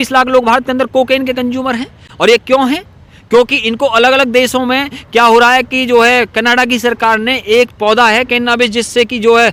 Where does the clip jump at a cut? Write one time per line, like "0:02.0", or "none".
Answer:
none